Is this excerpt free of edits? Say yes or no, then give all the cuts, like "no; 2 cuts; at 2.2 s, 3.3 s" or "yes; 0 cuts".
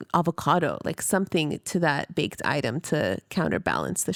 yes; 0 cuts